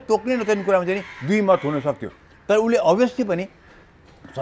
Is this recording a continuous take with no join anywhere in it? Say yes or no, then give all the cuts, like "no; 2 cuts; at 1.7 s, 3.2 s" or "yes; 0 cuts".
yes; 0 cuts